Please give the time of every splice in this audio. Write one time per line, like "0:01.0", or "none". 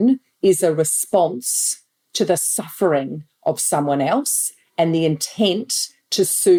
none